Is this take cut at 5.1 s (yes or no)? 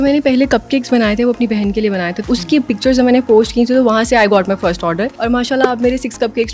yes